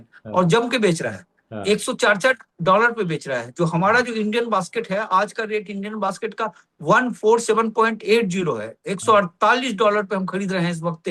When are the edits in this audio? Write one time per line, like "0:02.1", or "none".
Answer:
none